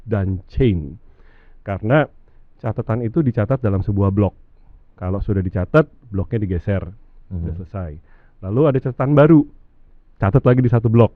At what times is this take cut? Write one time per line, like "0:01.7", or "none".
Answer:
none